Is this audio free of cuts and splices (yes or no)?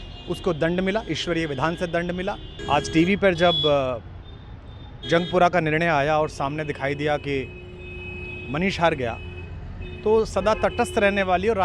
no